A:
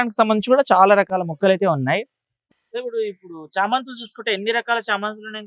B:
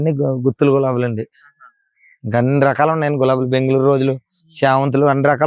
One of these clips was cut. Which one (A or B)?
A